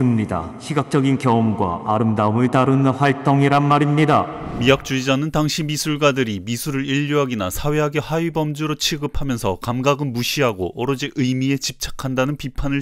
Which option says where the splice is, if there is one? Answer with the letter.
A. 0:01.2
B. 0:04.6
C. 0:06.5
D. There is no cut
D